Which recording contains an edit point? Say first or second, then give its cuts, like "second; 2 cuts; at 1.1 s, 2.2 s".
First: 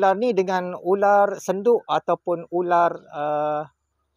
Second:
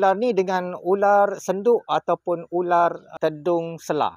second; 1 cut; at 3.1 s